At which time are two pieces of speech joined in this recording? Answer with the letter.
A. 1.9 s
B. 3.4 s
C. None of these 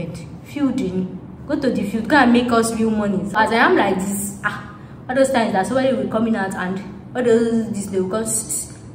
B